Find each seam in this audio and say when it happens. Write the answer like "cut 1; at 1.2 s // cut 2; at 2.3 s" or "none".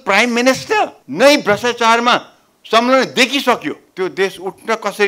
cut 1; at 1.0 s // cut 2; at 3.8 s